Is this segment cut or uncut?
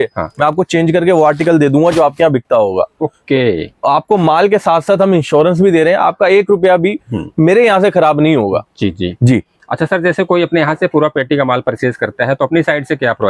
uncut